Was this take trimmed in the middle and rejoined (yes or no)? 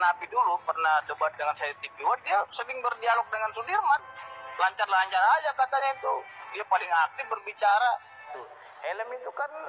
yes